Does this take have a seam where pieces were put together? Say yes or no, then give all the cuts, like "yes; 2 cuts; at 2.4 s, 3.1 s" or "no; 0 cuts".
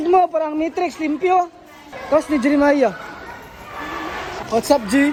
no; 0 cuts